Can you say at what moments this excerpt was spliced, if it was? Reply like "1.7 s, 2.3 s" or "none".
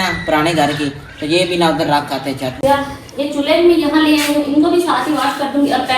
2.6 s